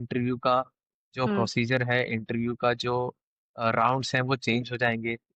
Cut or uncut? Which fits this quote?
uncut